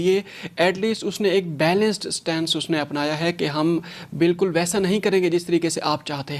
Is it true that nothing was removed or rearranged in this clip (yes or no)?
yes